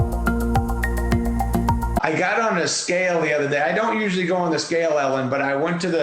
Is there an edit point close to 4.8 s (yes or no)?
no